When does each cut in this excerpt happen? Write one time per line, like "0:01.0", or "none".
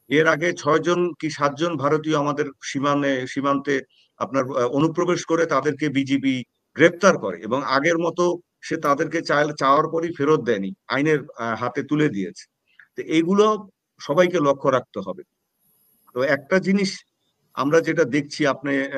none

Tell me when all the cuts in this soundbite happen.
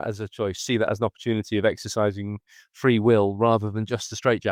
none

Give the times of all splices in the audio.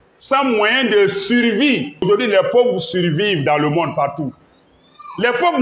0:02.0

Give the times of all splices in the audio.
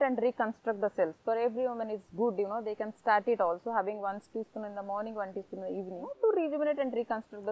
0:06.0

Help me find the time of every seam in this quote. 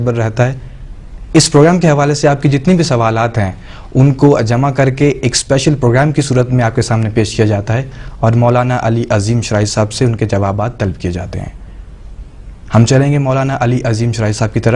0:08.0

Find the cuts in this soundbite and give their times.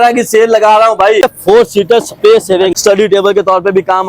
0:01.2
0:02.8

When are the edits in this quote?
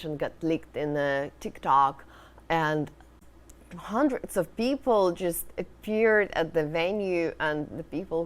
0:03.1

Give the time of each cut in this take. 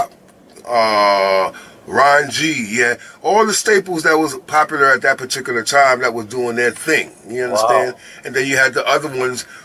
none

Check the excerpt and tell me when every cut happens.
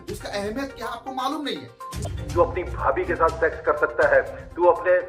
0:02.1

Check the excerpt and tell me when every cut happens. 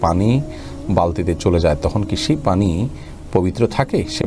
none

